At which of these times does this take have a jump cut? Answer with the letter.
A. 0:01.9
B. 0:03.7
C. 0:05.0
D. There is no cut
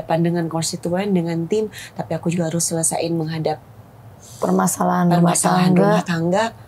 D